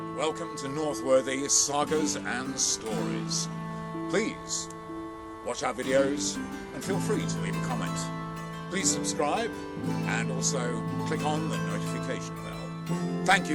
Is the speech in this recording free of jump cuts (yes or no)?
yes